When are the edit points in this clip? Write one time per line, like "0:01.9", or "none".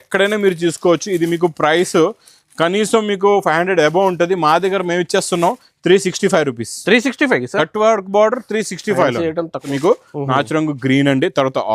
0:09.7